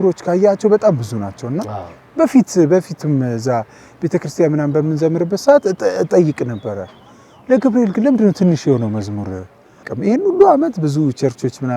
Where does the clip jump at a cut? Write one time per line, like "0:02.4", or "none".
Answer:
0:09.9